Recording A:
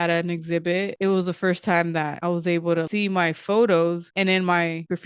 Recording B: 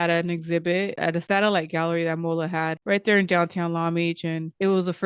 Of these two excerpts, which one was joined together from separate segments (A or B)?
A